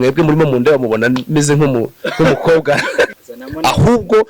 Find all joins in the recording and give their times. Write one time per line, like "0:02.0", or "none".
0:03.1